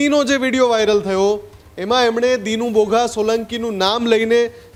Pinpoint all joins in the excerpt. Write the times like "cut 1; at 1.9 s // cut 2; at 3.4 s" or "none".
none